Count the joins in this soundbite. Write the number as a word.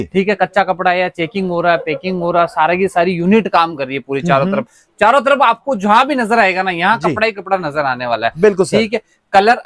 zero